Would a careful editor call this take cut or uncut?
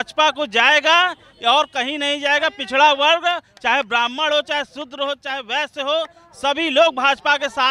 uncut